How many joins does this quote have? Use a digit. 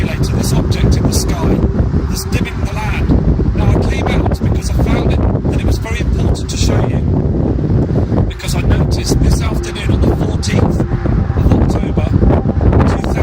1